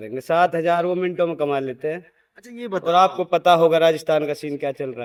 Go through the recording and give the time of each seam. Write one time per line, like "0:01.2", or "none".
none